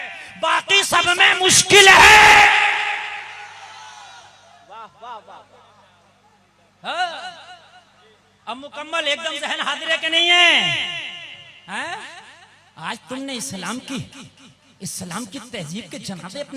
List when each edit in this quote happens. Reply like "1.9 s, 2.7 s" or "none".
none